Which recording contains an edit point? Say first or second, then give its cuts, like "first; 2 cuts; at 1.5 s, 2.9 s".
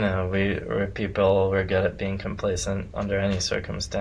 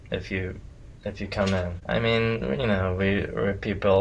second; 1 cut; at 1.8 s